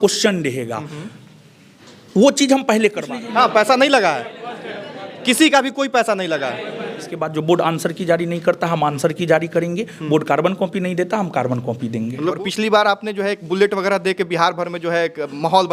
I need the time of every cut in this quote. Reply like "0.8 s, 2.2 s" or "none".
3.1 s, 7.3 s, 12.2 s

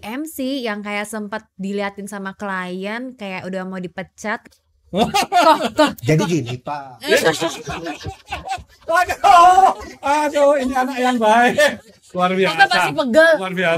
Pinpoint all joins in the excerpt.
4.4 s

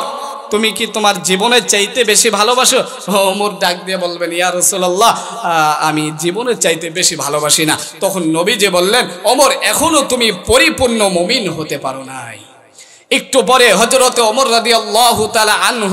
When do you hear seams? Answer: none

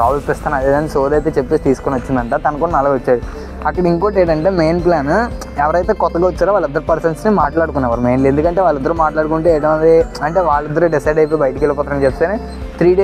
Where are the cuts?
none

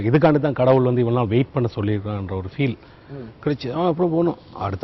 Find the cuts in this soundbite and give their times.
none

